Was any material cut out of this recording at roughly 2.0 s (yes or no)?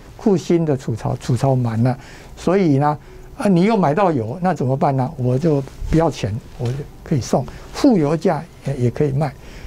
yes